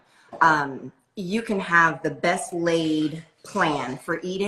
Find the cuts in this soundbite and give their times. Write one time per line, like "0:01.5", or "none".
none